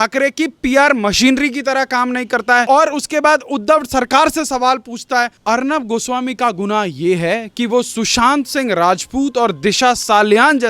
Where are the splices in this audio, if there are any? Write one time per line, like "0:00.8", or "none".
0:02.6